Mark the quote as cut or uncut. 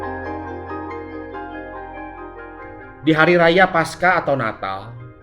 cut